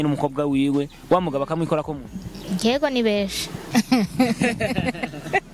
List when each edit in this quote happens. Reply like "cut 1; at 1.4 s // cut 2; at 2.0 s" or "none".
cut 1; at 3.6 s

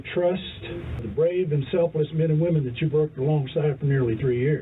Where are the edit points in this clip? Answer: cut 1; at 1.1 s

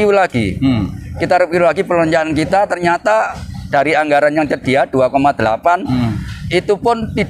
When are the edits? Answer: none

